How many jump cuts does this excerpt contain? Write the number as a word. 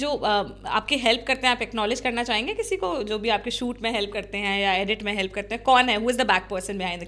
zero